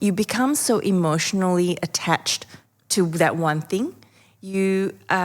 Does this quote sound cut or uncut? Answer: uncut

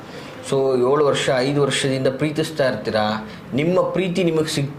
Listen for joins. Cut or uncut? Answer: uncut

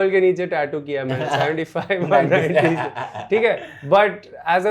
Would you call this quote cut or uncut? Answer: uncut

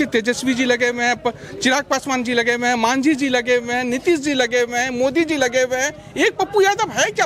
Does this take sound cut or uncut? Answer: uncut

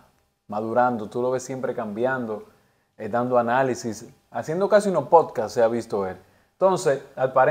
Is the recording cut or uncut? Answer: uncut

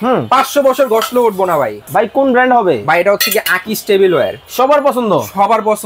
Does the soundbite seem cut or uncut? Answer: cut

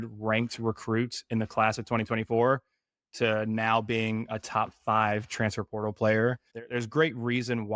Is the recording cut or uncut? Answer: cut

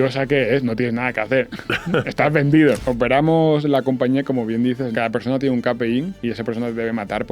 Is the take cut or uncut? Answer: cut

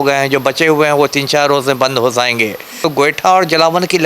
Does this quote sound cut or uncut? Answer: cut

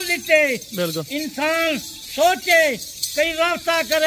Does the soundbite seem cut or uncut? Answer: uncut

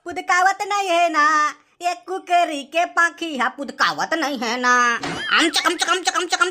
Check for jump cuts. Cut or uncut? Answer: cut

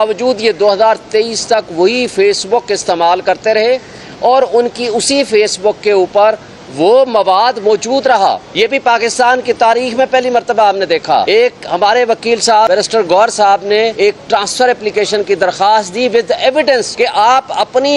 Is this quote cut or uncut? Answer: cut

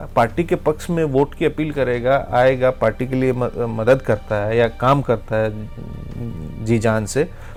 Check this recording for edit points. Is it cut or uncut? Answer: uncut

